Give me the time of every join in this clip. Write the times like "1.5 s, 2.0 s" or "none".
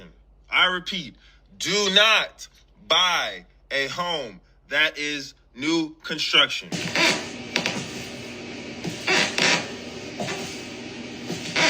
6.7 s